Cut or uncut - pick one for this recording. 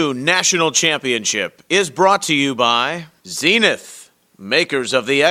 cut